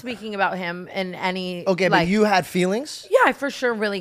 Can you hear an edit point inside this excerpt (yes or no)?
no